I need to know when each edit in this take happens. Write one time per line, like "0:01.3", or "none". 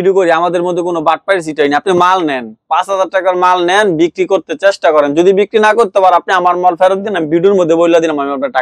none